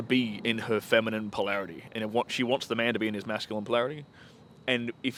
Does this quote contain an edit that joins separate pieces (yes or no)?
no